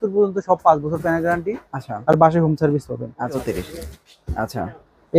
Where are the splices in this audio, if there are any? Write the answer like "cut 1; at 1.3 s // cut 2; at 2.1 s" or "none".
cut 1; at 3.4 s